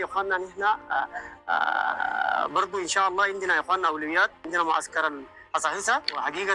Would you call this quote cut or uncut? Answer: uncut